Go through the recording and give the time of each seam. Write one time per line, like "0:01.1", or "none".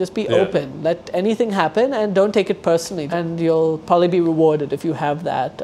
0:03.0